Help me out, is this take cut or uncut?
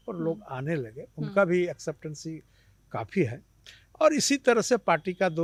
uncut